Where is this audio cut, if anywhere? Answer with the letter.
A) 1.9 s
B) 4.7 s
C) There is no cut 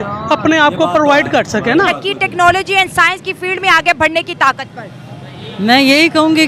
A